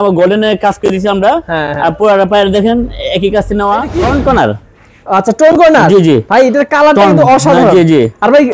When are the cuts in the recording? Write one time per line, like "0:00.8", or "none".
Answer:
0:03.9